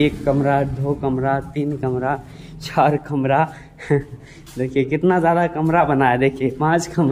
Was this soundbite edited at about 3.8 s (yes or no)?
no